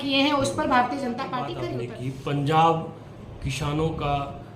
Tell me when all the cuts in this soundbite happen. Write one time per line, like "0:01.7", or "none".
0:01.6